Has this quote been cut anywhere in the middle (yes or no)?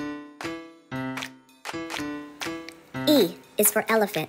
no